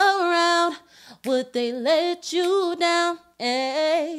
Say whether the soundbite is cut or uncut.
uncut